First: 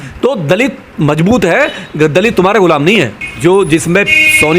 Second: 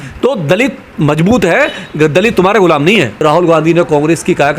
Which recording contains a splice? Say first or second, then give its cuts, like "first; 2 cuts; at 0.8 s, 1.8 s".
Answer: second; 1 cut; at 3.2 s